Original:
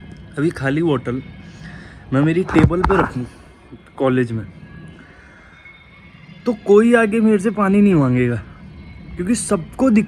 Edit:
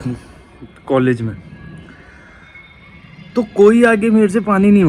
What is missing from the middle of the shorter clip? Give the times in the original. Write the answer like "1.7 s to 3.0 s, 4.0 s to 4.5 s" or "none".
none